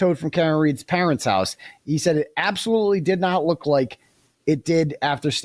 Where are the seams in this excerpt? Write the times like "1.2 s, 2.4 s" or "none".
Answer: none